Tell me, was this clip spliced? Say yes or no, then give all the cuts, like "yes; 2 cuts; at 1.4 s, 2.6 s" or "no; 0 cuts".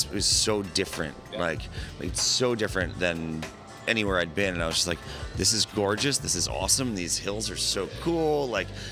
no; 0 cuts